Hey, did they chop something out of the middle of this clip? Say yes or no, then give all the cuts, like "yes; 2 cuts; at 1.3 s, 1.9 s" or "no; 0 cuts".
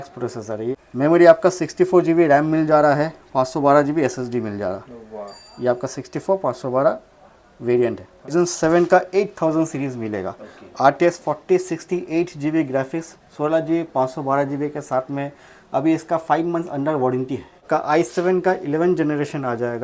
yes; 3 cuts; at 0.7 s, 8.3 s, 17.6 s